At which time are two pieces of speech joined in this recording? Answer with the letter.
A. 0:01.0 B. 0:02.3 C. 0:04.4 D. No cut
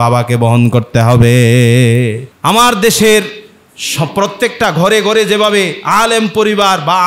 B